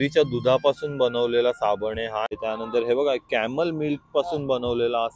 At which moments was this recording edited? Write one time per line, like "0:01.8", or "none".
0:02.3